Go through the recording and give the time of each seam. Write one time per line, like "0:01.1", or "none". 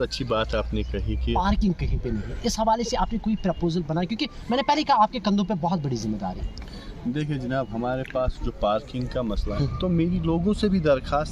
0:01.3
0:09.5